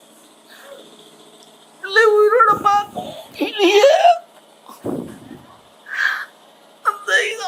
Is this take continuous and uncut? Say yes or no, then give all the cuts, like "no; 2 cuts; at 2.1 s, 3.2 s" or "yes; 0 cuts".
yes; 0 cuts